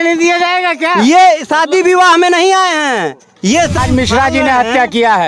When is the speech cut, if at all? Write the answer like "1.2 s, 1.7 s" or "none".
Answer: 3.8 s